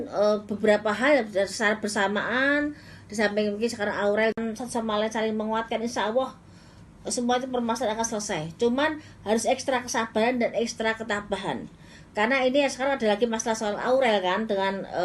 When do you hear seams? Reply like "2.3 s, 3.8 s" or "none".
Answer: 4.4 s